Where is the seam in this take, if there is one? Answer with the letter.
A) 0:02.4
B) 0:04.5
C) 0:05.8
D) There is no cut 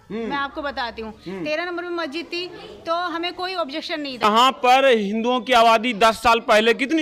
B